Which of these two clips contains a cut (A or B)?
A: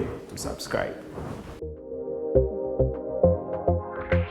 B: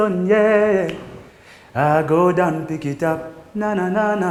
A